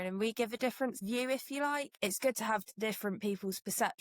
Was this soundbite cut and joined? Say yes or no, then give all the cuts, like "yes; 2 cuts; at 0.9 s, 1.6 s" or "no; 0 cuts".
yes; 2 cuts; at 1.0 s, 1.9 s